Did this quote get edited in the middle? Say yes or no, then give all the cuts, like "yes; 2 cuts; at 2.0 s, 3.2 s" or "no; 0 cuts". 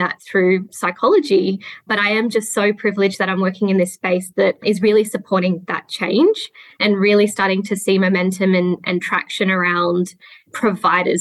yes; 2 cuts; at 4.6 s, 6.8 s